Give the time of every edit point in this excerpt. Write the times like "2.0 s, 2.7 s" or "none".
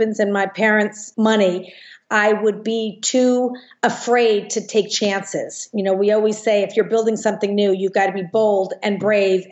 1.0 s